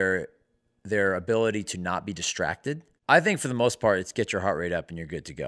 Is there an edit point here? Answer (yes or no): yes